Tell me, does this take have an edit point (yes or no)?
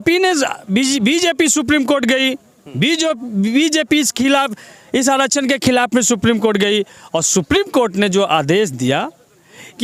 no